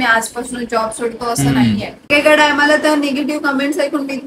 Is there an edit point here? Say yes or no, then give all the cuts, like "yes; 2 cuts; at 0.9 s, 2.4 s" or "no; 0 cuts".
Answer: yes; 1 cut; at 2.1 s